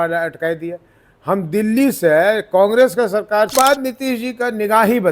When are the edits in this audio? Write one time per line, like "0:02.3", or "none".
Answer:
0:03.5